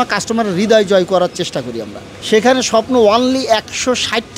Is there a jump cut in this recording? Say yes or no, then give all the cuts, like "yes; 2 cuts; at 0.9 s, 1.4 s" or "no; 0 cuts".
yes; 1 cut; at 2.1 s